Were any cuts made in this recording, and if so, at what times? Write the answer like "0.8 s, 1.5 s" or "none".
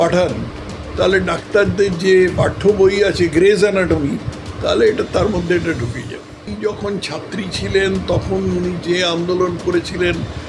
6.5 s